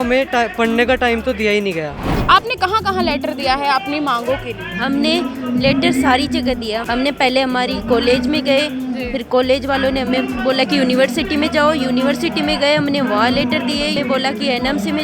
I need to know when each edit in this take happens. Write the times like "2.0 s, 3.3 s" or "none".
2.1 s, 6.8 s, 14.0 s